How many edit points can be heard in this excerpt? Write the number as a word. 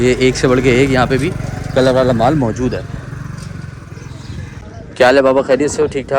zero